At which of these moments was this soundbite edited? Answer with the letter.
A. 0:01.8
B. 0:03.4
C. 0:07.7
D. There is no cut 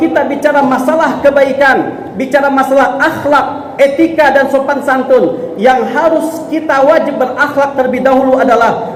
D